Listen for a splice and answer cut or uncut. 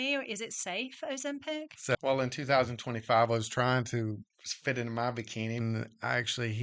cut